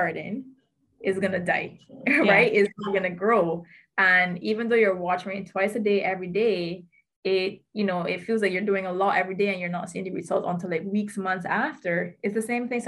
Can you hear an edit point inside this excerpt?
no; 0 cuts

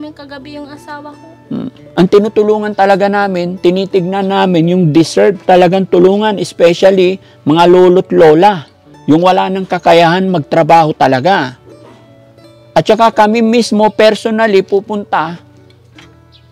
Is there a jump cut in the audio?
yes; 1 cut; at 1.8 s

